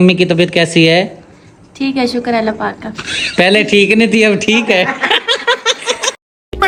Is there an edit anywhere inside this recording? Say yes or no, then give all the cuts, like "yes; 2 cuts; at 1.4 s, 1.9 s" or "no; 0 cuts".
no; 0 cuts